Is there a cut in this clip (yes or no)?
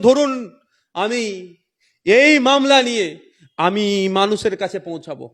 no